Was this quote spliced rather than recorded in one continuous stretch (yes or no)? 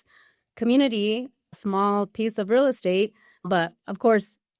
no